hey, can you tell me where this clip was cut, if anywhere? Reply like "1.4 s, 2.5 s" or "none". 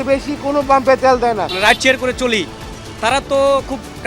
1.5 s